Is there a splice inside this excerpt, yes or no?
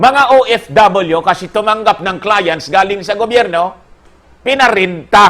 no